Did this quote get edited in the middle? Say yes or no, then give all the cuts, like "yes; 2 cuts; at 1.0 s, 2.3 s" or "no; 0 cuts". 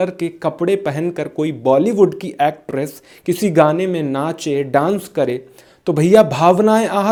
no; 0 cuts